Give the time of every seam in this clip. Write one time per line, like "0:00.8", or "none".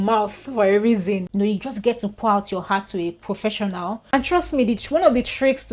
0:01.3
0:04.0